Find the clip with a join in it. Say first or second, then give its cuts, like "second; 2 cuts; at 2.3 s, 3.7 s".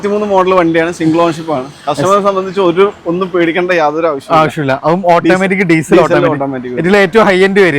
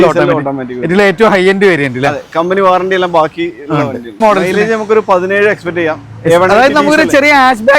second; 1 cut; at 4.2 s